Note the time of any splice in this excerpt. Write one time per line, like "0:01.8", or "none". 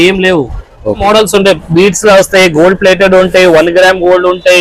0:01.0